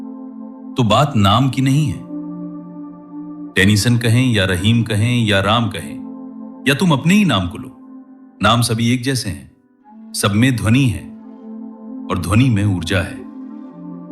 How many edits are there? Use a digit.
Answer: 3